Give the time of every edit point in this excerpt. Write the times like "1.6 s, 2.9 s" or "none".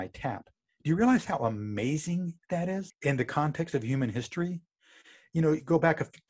2.9 s